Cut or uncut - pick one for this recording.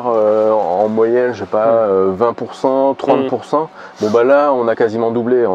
uncut